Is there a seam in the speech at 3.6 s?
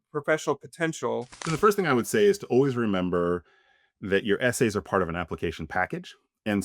no; 1 cut; at 1.4 s

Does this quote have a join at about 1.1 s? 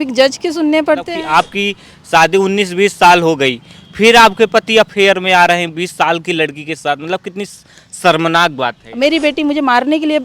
yes; 2 cuts; at 1.1 s, 8.8 s

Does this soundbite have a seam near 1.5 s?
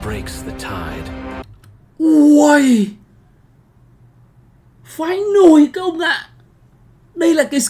no; 0 cuts

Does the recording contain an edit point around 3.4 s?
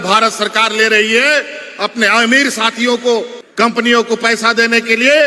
yes; 1 cut; at 3.4 s

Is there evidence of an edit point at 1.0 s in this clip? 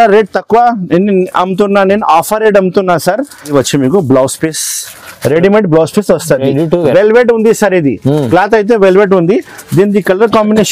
no; 1 cut; at 3.5 s

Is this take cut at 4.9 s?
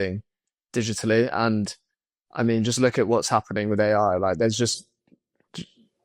no; 0 cuts

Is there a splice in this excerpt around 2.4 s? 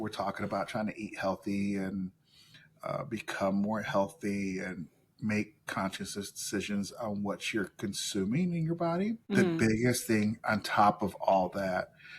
no; 1 cut; at 9.2 s

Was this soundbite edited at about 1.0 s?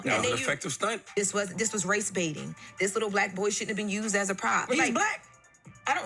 yes; 2 cuts; at 1.0 s, 4.7 s

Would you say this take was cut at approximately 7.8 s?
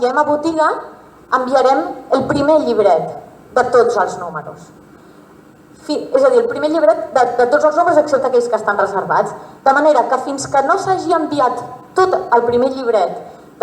no; 1 cut; at 11.0 s

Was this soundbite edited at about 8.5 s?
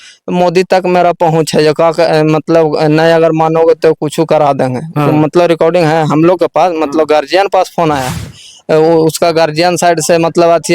yes; 1 cut; at 8.5 s

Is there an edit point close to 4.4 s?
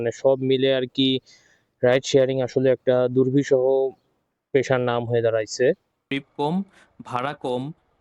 no; 1 cut; at 6.0 s

